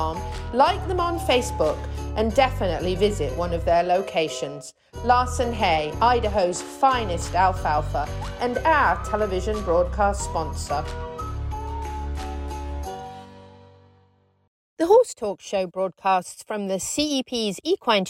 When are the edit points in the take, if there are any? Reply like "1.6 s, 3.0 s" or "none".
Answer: 14.6 s